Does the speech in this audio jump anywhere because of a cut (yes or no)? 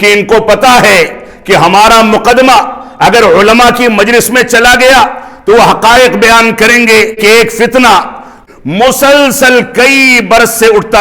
yes